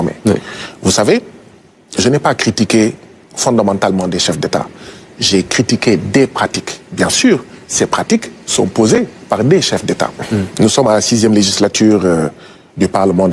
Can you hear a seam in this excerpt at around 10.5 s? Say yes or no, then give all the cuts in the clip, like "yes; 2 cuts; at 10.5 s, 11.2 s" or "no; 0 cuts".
yes; 1 cut; at 10.5 s